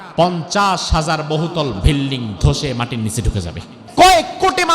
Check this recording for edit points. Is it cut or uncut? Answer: cut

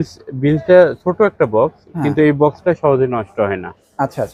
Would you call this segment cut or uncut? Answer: uncut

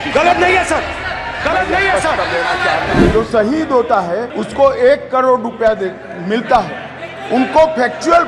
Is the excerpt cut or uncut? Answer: cut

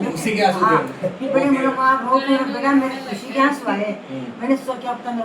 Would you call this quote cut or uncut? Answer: uncut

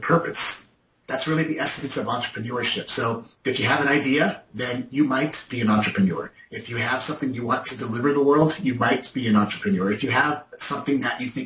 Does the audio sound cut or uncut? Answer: cut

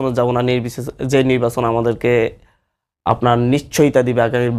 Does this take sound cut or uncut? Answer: uncut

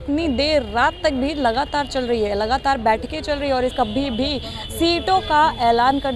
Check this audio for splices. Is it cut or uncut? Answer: cut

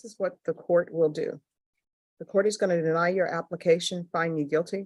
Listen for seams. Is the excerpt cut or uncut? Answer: uncut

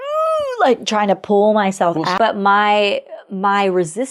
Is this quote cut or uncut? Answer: cut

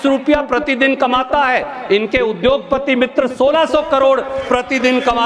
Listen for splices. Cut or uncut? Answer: uncut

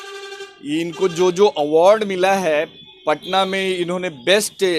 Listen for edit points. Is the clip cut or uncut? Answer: uncut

